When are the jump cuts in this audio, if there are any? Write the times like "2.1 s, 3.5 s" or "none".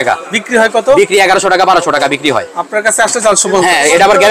none